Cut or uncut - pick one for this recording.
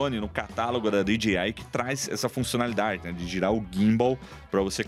uncut